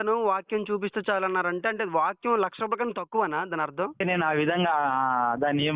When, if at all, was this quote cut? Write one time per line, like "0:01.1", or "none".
0:04.0